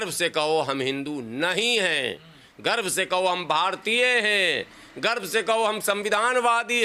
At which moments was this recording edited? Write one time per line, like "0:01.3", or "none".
none

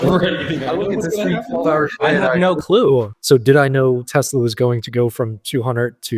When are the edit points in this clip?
0:02.6

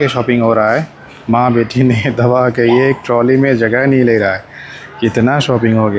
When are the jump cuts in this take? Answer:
none

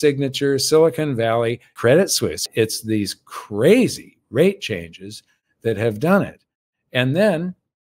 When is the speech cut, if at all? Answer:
0:01.7
0:02.5

